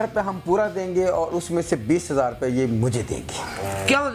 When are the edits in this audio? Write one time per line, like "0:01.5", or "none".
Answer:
none

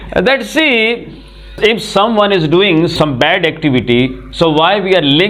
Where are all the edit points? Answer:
0:01.5
0:02.9

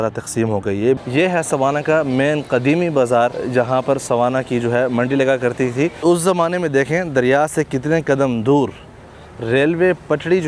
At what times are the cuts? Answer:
0:01.0
0:03.4
0:06.0

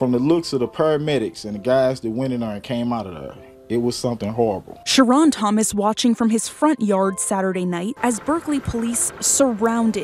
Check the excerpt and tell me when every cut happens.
none

